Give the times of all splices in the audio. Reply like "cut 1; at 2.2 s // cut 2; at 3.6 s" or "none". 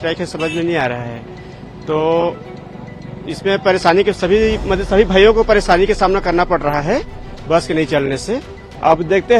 none

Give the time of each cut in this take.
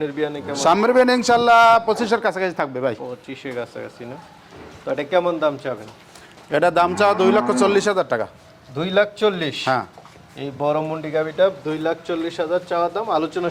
none

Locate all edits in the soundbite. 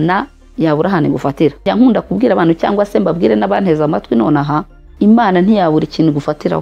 cut 1; at 1.7 s // cut 2; at 4.8 s

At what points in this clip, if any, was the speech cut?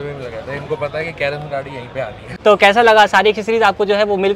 cut 1; at 2.2 s

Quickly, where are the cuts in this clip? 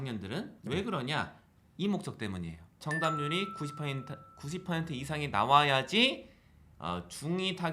cut 1; at 2.8 s

